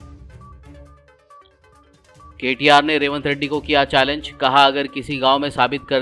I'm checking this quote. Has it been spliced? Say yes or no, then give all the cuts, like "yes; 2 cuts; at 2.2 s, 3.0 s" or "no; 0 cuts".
yes; 1 cut; at 1.5 s